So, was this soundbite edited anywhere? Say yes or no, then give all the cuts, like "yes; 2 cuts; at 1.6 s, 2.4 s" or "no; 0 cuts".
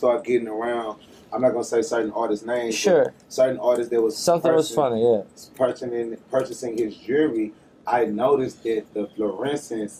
no; 0 cuts